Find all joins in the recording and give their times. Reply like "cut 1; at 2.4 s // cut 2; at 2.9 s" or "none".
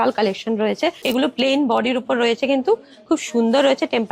cut 1; at 1.0 s